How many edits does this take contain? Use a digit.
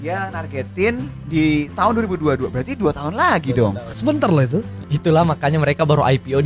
2